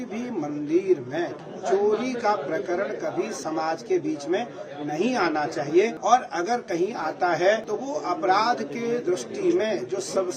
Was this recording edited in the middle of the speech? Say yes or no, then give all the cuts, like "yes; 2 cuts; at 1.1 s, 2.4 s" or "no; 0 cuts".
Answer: yes; 4 cuts; at 1.4 s, 3.3 s, 6.0 s, 7.7 s